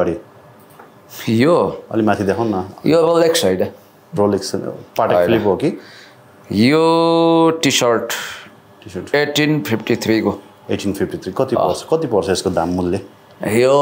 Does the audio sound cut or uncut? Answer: uncut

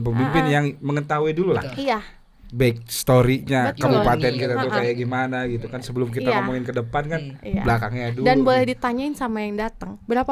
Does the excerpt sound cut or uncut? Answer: uncut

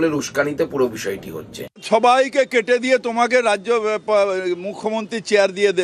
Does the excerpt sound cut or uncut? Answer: cut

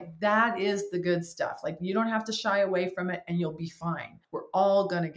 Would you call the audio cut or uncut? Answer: cut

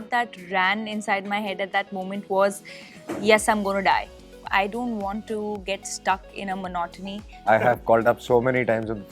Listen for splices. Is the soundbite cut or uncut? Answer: cut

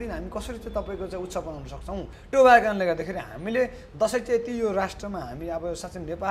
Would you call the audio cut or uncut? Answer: cut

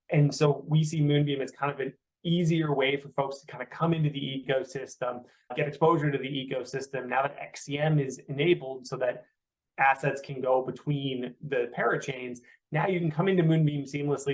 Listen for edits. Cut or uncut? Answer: cut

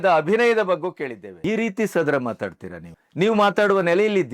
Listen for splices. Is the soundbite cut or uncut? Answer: cut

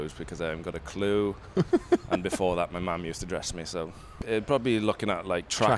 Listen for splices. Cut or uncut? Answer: cut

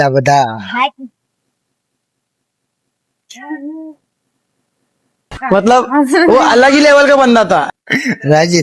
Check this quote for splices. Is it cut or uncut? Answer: uncut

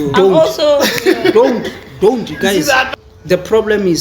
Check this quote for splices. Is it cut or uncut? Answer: cut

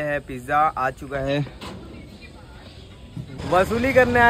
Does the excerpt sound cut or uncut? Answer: cut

